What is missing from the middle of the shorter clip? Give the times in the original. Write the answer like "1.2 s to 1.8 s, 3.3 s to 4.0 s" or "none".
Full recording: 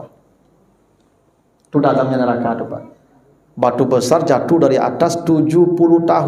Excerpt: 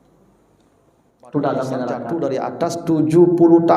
2.5 s to 4.5 s